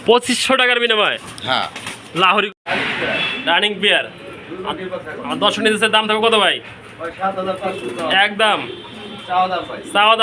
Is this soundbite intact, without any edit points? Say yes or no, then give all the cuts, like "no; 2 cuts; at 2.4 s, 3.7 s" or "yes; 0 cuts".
no; 1 cut; at 2.5 s